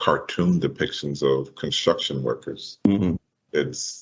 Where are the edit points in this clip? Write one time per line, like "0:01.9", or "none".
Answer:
none